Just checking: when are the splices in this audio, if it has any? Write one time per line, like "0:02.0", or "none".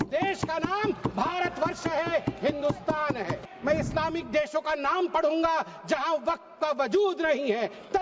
0:03.4